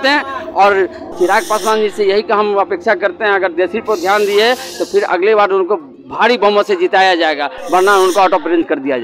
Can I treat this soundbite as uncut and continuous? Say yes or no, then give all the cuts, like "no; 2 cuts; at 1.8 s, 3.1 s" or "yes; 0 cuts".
no; 1 cut; at 1.0 s